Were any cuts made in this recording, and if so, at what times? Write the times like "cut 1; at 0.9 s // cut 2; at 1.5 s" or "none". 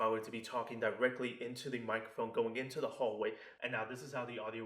cut 1; at 3.5 s